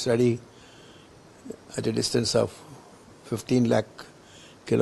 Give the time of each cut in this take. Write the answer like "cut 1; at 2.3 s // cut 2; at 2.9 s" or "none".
none